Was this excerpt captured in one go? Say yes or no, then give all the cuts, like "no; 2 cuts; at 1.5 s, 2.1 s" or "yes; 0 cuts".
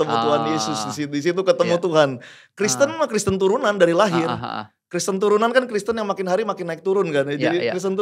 yes; 0 cuts